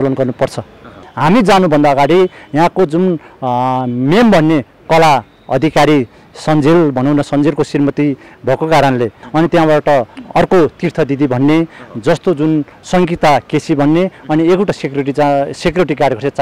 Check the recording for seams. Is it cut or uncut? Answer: cut